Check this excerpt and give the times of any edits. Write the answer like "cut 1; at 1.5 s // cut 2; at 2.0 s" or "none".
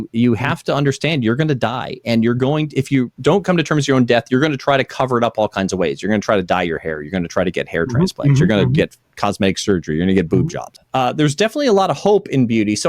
cut 1; at 3.1 s // cut 2; at 10.7 s